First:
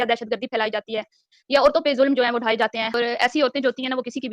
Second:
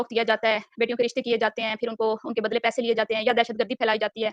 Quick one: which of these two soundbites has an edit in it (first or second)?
first